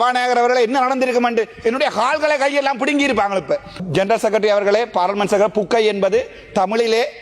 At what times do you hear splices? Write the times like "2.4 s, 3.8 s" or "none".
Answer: 3.8 s